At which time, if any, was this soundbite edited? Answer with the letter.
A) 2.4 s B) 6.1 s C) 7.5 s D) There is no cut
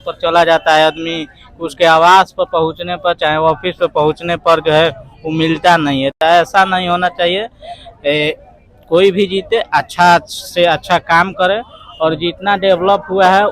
D